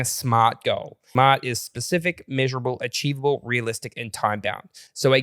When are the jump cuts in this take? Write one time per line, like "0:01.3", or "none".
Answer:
0:01.0